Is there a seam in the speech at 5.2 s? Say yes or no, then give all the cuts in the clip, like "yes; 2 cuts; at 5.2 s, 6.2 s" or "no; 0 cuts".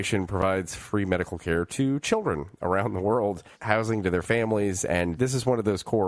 yes; 1 cut; at 5.2 s